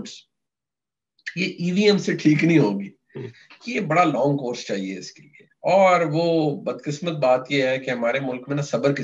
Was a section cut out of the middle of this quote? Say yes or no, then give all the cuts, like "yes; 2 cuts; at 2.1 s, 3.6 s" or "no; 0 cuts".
no; 0 cuts